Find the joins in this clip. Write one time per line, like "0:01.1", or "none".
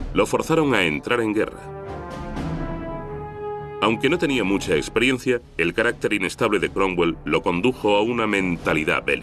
none